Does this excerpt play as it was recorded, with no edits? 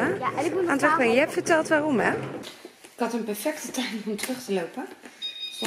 no; 1 cut; at 2.4 s

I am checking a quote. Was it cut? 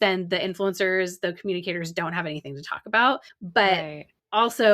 no; 0 cuts

